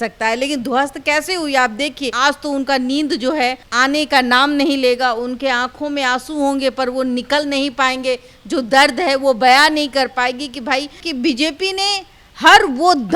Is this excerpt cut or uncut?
cut